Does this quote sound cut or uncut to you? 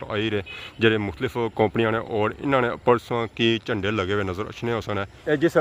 uncut